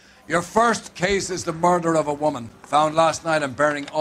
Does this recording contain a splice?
no; 0 cuts

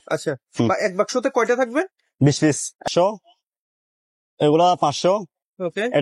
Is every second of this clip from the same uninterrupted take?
no; 1 cut; at 2.8 s

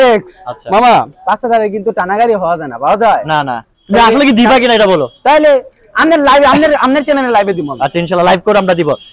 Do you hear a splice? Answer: no; 0 cuts

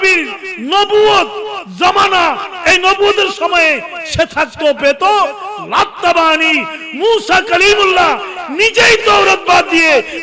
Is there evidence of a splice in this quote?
no; 0 cuts

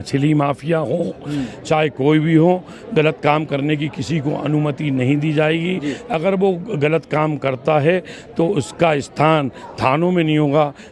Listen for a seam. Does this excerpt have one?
no; 0 cuts

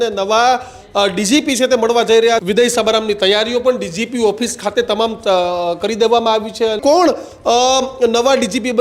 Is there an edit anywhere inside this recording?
yes; 2 cuts; at 2.4 s, 6.8 s

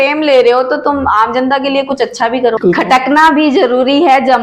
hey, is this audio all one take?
no; 1 cut; at 2.6 s

